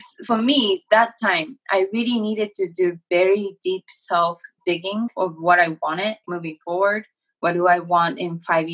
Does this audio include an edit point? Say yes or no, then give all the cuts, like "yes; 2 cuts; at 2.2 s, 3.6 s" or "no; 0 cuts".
yes; 2 cuts; at 5.0 s, 6.3 s